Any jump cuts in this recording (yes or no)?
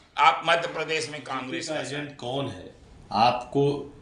yes